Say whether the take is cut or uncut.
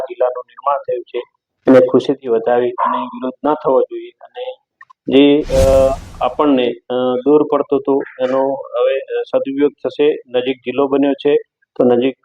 uncut